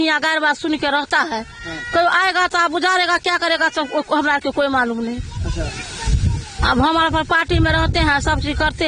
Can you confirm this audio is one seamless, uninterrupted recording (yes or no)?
yes